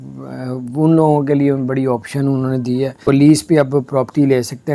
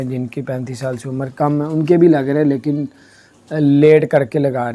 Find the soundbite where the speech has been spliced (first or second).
first